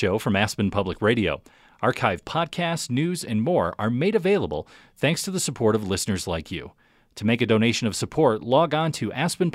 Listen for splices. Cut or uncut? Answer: uncut